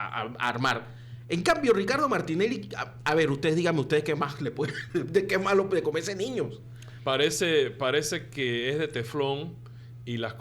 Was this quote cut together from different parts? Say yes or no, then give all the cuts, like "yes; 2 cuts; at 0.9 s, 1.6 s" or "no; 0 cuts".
no; 0 cuts